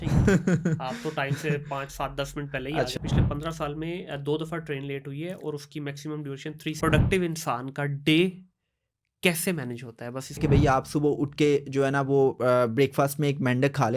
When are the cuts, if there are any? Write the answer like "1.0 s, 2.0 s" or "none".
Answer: 3.0 s, 6.8 s, 10.4 s